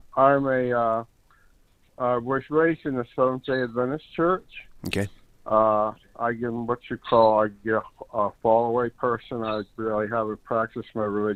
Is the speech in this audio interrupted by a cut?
no; 0 cuts

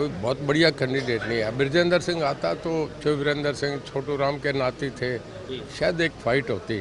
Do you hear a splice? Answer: no; 0 cuts

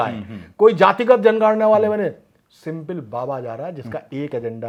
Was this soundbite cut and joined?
no; 0 cuts

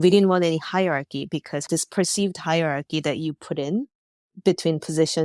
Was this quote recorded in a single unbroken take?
no; 1 cut; at 1.7 s

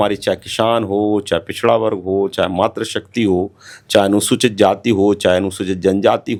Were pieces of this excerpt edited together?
no; 0 cuts

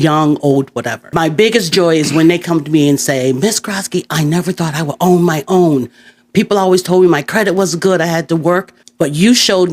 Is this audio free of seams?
no; 2 cuts; at 1.1 s, 8.8 s

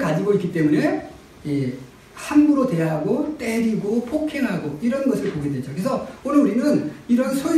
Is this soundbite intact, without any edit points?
yes; 0 cuts

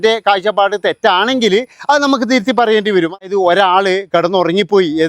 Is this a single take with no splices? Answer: no; 1 cut; at 3.3 s

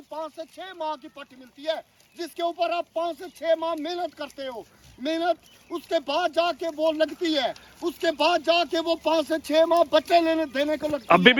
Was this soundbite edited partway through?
no; 0 cuts

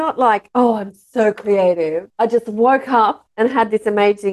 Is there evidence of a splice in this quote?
no; 0 cuts

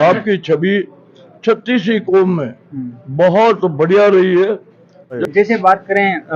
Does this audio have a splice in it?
yes; 1 cut; at 5.2 s

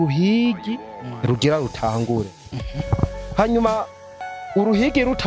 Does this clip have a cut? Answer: no; 0 cuts

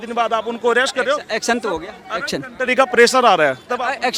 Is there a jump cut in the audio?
no; 0 cuts

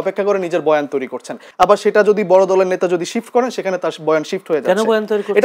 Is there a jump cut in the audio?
yes; 1 cut; at 1.4 s

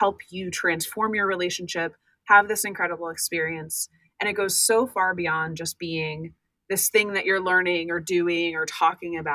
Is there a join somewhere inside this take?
no; 0 cuts

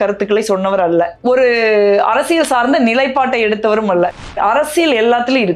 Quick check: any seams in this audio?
yes; 1 cut; at 4.2 s

